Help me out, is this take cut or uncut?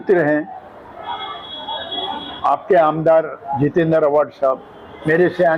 uncut